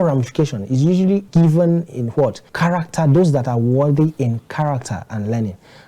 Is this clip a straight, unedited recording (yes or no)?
no